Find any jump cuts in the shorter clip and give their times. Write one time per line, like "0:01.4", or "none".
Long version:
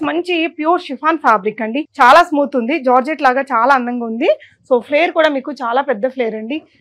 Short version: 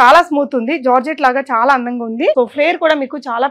0:02.3